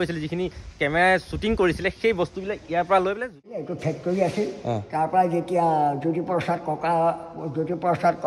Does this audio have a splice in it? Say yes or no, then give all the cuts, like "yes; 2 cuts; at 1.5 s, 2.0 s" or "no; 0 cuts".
yes; 1 cut; at 3.6 s